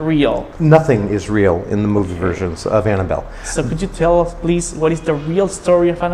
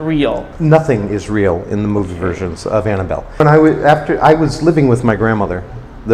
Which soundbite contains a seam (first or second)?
second